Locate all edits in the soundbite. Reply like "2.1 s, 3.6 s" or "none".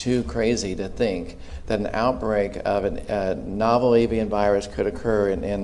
none